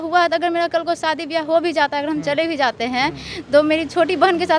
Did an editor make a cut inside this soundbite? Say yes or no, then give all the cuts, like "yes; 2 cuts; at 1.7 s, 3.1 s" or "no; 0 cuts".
no; 0 cuts